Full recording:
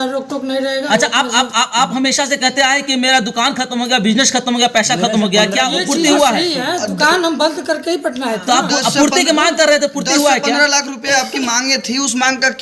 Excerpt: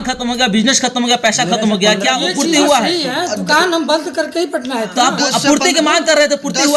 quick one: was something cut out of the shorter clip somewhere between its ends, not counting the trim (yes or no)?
no